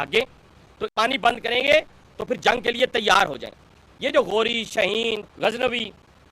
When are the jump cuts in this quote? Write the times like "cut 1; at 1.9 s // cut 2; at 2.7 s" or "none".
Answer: cut 1; at 0.9 s